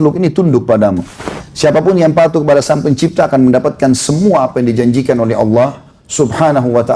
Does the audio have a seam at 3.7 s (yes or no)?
no